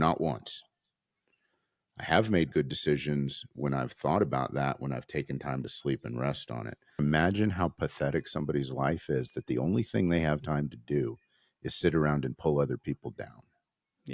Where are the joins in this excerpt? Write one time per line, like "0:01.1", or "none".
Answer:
0:07.0

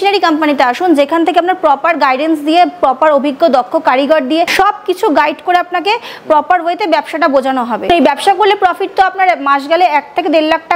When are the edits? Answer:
0:04.5
0:07.9

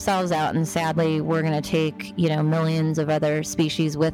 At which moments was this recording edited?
none

